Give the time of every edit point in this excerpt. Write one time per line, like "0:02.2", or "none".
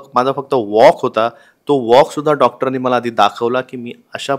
none